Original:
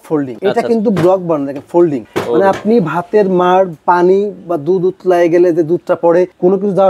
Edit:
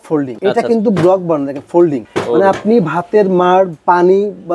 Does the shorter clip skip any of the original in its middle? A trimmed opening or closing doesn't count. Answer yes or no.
no